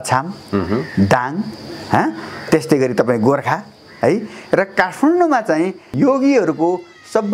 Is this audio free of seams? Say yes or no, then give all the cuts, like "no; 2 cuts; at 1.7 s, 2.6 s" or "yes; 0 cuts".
yes; 0 cuts